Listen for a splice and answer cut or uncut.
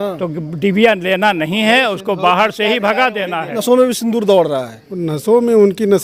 cut